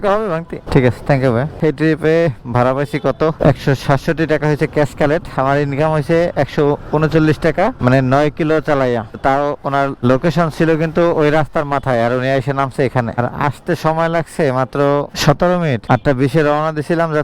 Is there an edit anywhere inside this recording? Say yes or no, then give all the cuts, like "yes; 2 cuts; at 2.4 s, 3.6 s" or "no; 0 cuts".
no; 0 cuts